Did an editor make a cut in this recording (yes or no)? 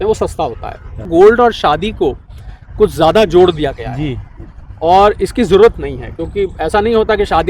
yes